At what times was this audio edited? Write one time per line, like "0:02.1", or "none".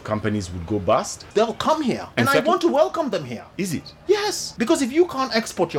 0:01.2
0:02.1
0:03.4
0:04.4